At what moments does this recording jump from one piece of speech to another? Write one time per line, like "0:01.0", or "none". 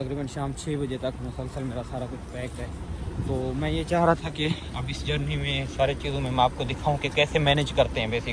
none